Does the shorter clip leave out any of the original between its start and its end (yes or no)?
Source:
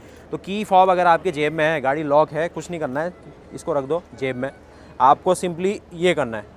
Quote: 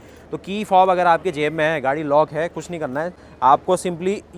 yes